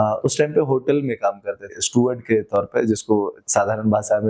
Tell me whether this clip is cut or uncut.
cut